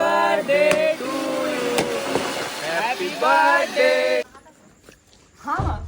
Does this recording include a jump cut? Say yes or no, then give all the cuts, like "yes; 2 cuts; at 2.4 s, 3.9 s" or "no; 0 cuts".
yes; 1 cut; at 4.4 s